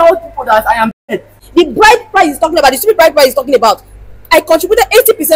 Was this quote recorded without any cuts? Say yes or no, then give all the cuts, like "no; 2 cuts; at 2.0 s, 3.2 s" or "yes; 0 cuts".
no; 1 cut; at 1.3 s